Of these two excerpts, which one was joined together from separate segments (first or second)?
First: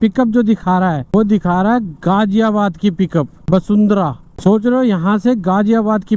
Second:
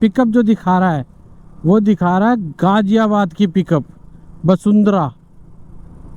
first